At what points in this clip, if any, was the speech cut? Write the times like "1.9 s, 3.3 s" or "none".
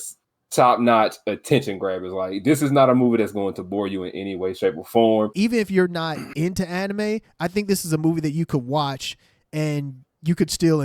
5.3 s